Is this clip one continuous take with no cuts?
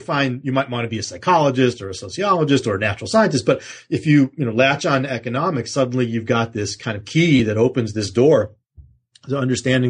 yes; 0 cuts

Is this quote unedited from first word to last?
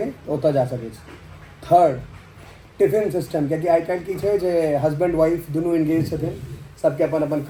yes; 0 cuts

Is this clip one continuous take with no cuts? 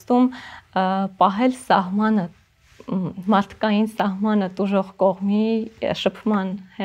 yes; 0 cuts

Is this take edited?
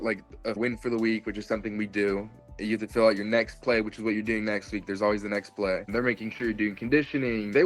yes; 1 cut; at 5.8 s

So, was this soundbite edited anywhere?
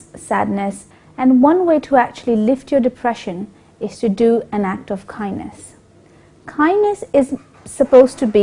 yes; 1 cut; at 5.1 s

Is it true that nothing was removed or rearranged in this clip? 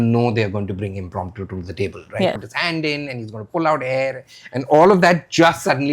no; 1 cut; at 2.5 s

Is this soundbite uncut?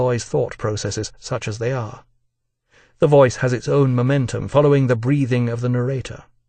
yes; 0 cuts

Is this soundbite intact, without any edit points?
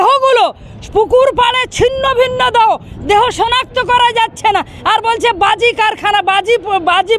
yes; 0 cuts

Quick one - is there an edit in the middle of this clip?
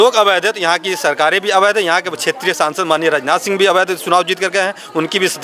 no; 0 cuts

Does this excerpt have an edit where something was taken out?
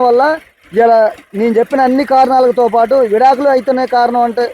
no; 0 cuts

